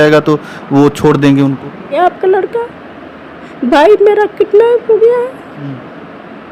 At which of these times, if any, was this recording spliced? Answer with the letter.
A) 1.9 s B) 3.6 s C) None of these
A